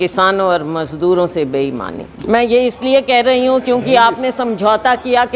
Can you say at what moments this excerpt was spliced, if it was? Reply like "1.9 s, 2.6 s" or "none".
2.0 s